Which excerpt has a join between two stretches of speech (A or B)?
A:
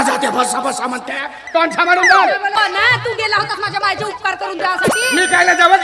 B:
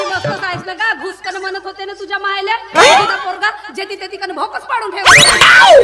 A